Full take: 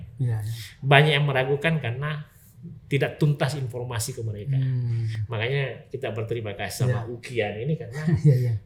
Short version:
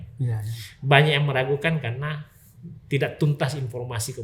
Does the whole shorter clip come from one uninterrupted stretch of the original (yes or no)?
yes